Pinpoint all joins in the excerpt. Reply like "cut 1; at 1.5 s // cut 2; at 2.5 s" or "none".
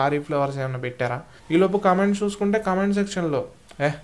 cut 1; at 1.3 s